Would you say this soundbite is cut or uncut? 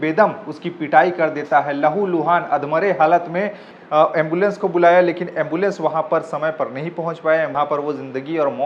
cut